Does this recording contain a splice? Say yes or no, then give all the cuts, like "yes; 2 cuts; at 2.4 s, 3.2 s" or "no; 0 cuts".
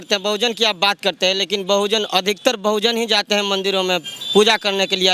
no; 0 cuts